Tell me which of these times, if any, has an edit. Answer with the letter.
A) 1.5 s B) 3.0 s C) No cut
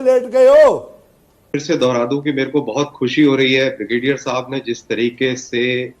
A